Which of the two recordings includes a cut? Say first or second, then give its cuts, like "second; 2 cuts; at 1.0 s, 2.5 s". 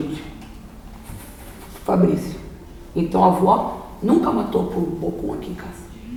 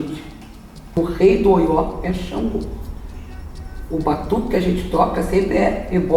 second; 1 cut; at 1.0 s